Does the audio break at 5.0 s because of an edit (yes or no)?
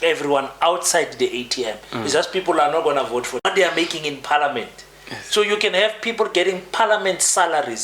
no